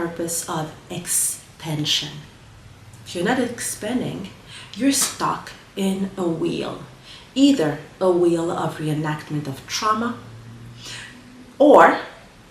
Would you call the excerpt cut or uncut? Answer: uncut